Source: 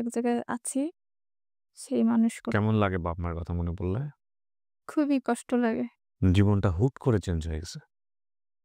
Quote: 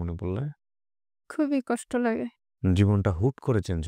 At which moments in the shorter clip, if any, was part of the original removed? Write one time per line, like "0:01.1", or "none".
none